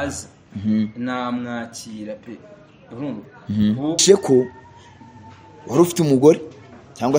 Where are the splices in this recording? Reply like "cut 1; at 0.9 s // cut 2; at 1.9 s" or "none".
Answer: cut 1; at 4.0 s

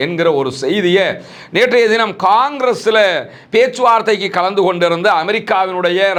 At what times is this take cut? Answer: none

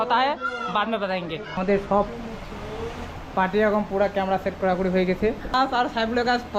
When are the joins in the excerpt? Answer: cut 1; at 1.6 s // cut 2; at 5.5 s

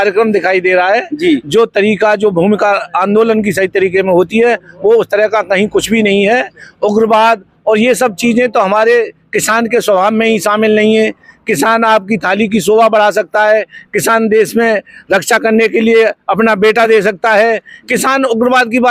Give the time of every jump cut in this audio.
none

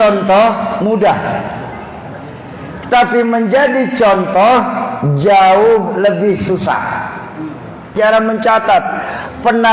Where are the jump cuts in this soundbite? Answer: cut 1; at 7.9 s

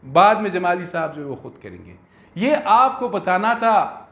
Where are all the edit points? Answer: none

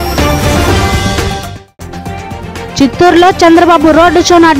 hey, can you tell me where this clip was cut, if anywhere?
none

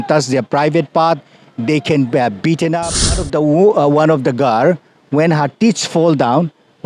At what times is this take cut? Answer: cut 1; at 3.3 s

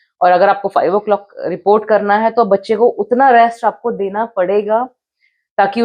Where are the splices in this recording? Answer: none

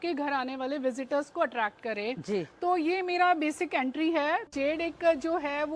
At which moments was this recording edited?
cut 1; at 4.5 s

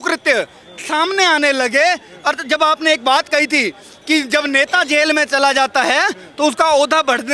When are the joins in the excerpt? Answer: none

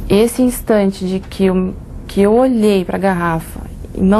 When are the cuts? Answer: none

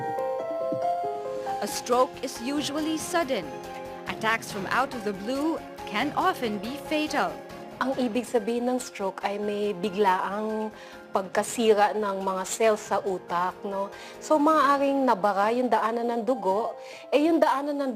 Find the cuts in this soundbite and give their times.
cut 1; at 1.1 s

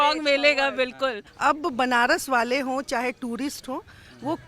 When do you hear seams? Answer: cut 1; at 1.3 s

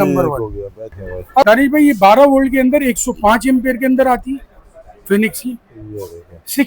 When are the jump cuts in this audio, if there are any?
cut 1; at 1.4 s

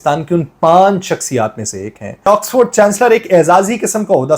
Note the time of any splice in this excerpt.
cut 1; at 2.3 s

